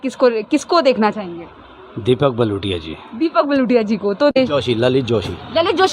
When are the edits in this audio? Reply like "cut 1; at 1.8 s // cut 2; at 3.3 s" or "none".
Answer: cut 1; at 4.3 s